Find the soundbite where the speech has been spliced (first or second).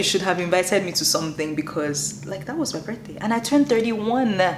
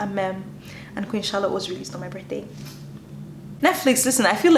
second